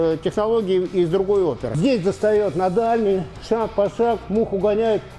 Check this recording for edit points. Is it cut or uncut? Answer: cut